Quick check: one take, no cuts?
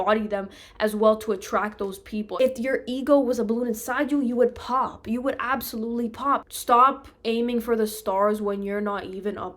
no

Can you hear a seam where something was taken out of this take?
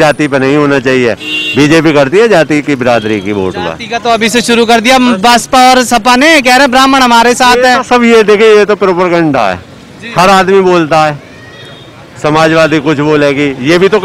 no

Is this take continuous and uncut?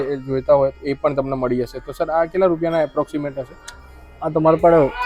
yes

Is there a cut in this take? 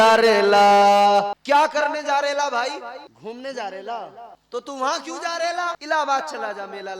yes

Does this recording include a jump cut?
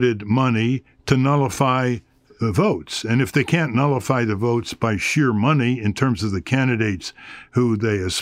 no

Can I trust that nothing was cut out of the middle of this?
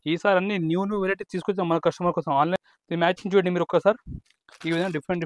no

